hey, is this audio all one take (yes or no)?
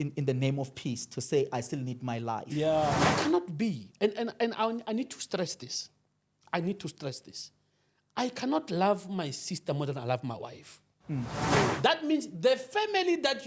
no